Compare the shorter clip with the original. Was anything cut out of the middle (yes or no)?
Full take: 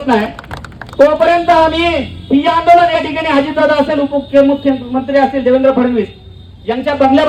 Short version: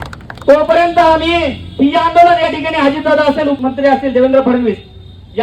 yes